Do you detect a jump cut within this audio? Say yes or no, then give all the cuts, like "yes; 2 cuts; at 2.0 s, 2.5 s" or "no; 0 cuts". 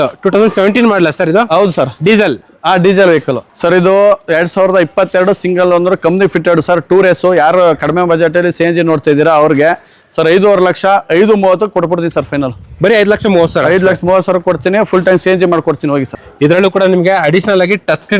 yes; 2 cuts; at 3.4 s, 16.2 s